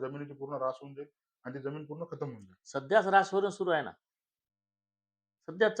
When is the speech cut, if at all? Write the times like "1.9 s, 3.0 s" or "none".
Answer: none